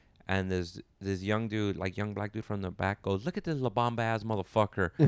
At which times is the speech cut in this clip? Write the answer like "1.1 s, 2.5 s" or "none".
none